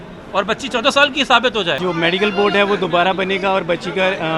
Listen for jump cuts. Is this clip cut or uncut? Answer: cut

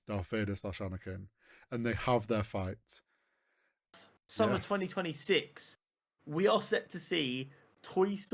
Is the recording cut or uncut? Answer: cut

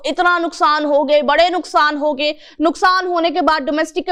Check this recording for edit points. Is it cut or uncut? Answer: uncut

